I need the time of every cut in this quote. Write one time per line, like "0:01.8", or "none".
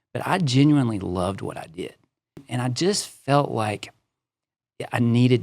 0:02.5

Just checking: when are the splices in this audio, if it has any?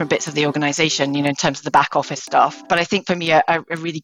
0:02.6

